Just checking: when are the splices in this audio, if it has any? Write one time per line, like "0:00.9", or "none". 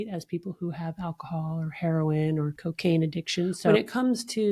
0:02.6
0:03.7